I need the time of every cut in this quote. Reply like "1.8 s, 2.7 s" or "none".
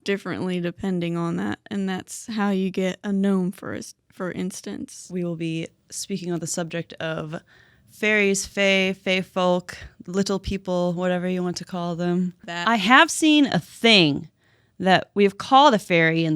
5.0 s, 12.5 s